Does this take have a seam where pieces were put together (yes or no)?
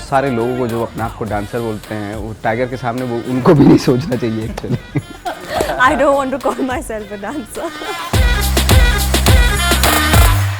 yes